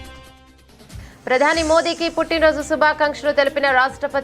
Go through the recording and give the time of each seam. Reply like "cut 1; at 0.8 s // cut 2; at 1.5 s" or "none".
cut 1; at 1.1 s